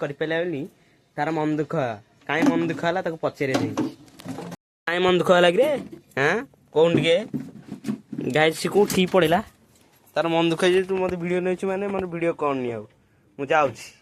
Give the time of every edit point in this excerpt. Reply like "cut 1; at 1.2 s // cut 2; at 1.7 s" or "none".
none